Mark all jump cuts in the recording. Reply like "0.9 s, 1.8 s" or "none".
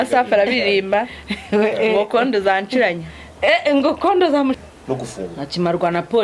4.6 s